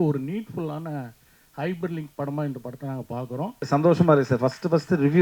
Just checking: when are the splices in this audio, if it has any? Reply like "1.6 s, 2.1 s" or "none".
3.6 s